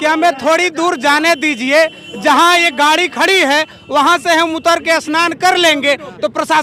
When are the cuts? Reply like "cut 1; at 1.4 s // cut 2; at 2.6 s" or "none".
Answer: none